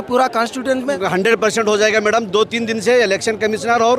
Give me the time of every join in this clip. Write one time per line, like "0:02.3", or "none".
0:00.9